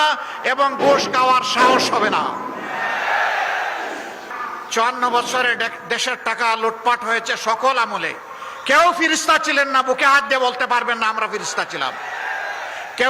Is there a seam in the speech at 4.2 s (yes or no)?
yes